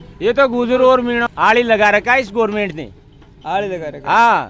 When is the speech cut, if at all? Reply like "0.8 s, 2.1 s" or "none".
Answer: 1.3 s